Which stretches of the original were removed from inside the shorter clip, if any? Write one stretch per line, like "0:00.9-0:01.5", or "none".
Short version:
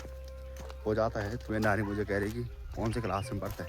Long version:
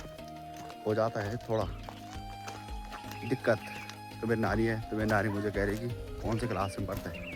0:01.4-0:04.9